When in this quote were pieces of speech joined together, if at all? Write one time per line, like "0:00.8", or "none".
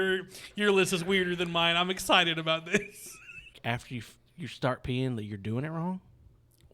0:03.6